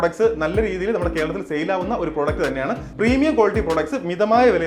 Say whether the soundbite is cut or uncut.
cut